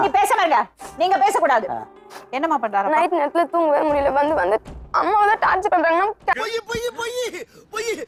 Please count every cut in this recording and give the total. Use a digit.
0